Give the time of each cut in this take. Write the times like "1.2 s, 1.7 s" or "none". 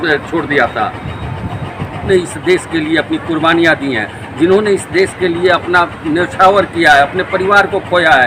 2.1 s